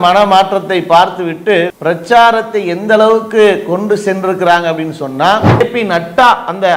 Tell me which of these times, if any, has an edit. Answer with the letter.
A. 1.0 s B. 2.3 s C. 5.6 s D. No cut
C